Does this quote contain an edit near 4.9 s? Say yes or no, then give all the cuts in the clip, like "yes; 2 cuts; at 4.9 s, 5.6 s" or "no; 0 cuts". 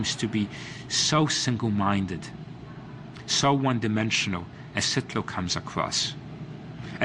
yes; 1 cut; at 4.9 s